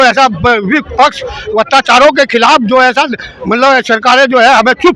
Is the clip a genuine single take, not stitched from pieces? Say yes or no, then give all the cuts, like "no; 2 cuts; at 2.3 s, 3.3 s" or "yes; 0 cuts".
yes; 0 cuts